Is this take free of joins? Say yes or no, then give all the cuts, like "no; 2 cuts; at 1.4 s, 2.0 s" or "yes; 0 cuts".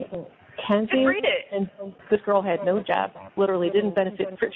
no; 1 cut; at 1.8 s